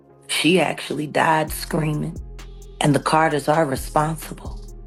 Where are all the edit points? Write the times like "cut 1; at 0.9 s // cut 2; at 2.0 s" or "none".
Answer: none

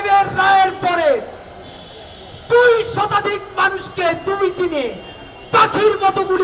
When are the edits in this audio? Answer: none

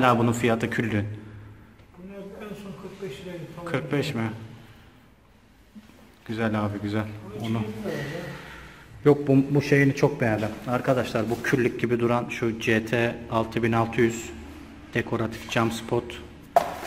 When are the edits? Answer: none

